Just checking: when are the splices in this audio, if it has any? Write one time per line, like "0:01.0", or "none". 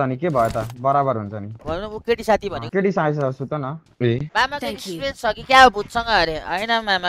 0:01.5
0:04.3